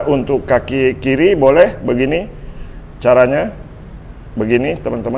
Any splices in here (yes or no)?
no